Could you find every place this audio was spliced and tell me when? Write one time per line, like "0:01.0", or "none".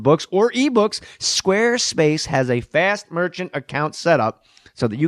0:02.5

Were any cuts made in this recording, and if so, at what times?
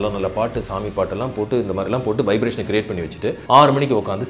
0:03.4

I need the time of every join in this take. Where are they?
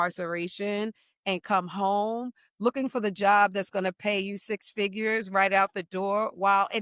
none

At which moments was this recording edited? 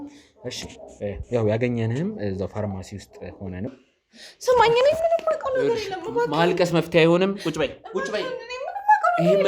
0:03.7

